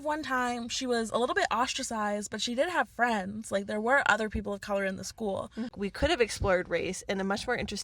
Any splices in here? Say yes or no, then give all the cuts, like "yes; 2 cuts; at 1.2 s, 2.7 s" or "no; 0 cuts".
yes; 1 cut; at 5.7 s